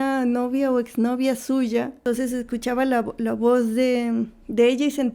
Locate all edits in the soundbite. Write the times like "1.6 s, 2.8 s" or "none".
2.0 s

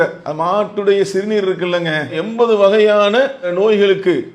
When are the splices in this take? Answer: none

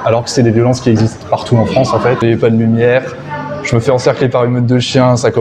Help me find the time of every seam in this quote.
2.2 s

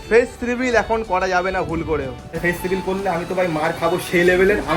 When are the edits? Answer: 2.4 s

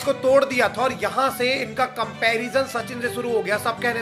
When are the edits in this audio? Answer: none

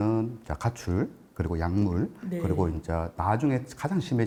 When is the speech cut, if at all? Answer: none

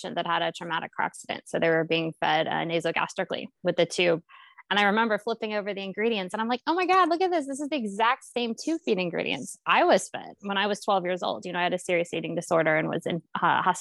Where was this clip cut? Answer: none

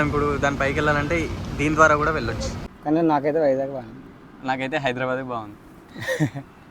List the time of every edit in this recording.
2.5 s

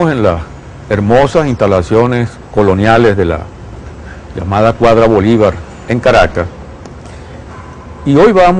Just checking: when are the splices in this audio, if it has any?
1.6 s

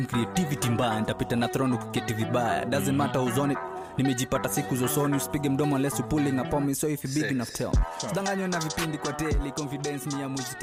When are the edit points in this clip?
none

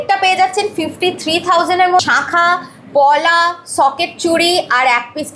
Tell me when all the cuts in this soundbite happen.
2.0 s

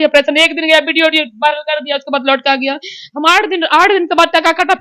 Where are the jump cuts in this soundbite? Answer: none

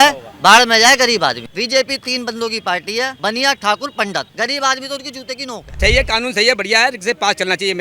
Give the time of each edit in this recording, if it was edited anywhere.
1.5 s, 3.1 s, 4.3 s, 5.8 s

